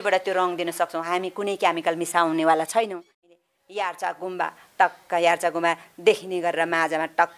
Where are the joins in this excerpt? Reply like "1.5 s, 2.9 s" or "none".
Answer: 3.2 s